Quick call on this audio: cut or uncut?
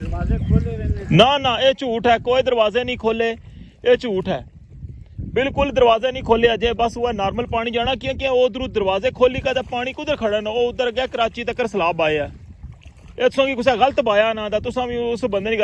uncut